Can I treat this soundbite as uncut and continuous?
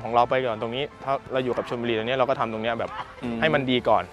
yes; 0 cuts

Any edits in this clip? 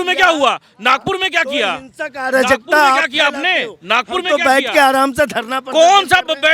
no; 0 cuts

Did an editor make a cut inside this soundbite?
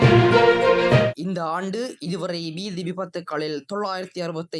yes; 1 cut; at 1.1 s

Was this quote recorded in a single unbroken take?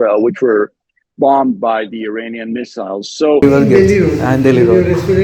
no; 1 cut; at 3.4 s

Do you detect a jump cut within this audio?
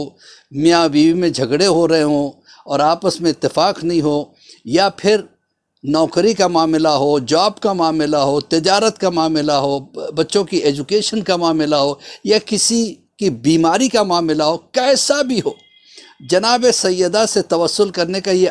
no; 0 cuts

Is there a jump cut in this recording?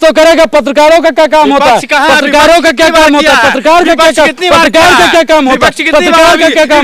no; 0 cuts

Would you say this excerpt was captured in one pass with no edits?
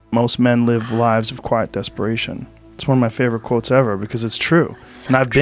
yes; 0 cuts

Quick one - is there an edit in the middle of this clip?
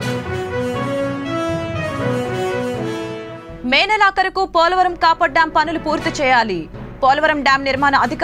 yes; 1 cut; at 3.3 s

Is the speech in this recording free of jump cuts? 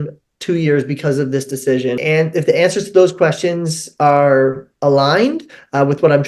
no; 1 cut; at 2.0 s

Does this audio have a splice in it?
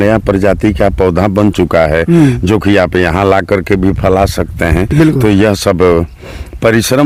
no; 0 cuts

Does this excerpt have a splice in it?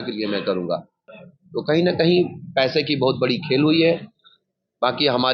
yes; 1 cut; at 1.0 s

